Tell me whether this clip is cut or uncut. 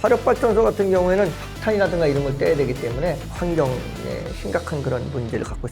cut